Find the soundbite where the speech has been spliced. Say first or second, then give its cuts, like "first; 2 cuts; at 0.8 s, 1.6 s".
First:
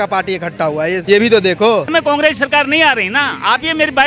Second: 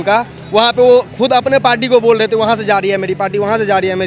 first; 2 cuts; at 1.0 s, 1.9 s